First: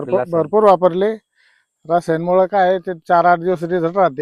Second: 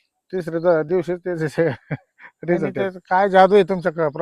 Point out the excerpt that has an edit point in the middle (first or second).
second